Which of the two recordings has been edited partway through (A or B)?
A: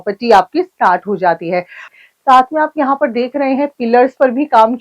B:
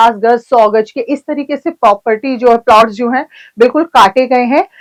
A